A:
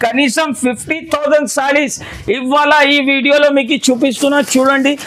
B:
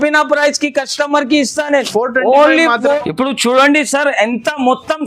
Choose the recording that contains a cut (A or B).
B